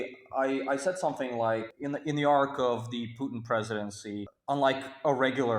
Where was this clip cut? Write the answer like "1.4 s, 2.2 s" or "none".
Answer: 1.7 s, 4.3 s